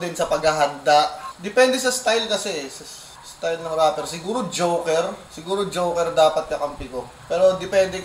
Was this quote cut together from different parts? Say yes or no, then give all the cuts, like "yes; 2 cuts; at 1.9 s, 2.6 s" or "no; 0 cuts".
no; 0 cuts